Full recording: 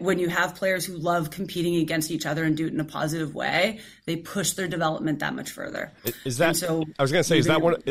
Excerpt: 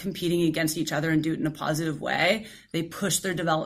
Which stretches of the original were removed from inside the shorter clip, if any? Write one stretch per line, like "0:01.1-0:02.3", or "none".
none